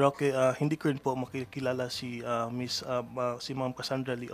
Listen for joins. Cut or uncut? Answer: uncut